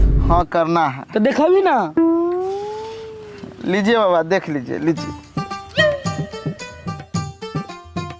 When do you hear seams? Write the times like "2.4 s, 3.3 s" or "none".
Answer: none